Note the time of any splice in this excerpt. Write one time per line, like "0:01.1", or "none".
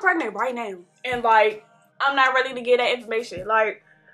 none